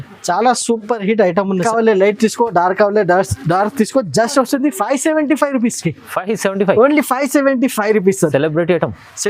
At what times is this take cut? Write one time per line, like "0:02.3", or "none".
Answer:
0:01.6